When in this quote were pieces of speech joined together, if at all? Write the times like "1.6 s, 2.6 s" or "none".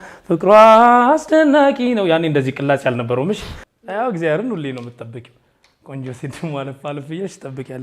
3.5 s